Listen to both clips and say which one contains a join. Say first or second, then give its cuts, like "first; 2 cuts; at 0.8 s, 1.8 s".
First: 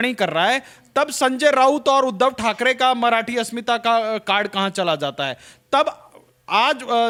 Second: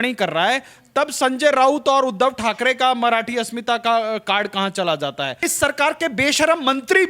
second; 1 cut; at 5.4 s